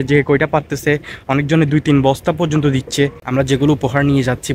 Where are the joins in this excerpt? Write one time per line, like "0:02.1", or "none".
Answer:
0:03.2

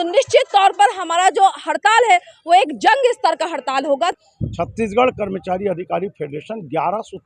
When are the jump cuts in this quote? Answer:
0:04.2

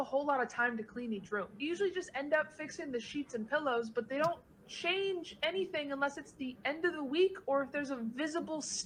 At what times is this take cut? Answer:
none

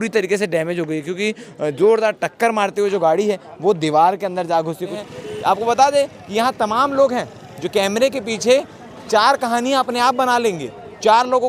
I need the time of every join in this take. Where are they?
0:05.0

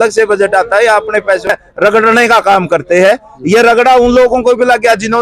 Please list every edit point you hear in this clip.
0:01.5

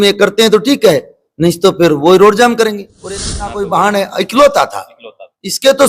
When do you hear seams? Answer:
0:03.0

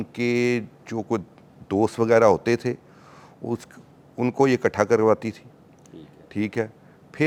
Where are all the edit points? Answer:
none

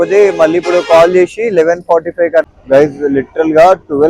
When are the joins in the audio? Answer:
0:02.5

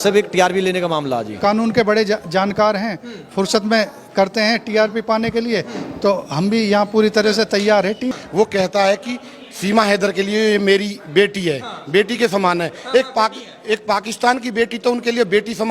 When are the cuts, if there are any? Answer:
0:01.3
0:08.2

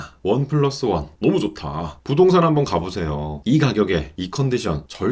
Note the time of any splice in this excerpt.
0:01.9

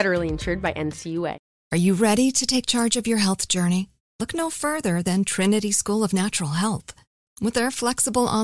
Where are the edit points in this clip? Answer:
0:01.5

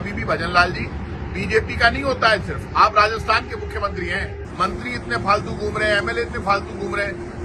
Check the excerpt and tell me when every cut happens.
0:04.4

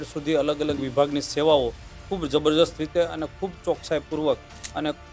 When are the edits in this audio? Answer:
none

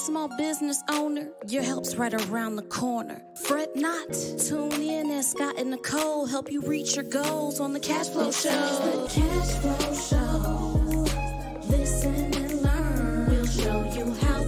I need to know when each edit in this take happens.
0:09.1

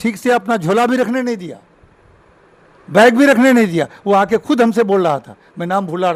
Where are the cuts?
none

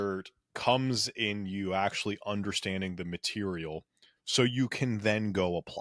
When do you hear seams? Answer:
none

